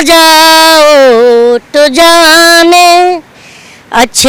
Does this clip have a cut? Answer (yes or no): no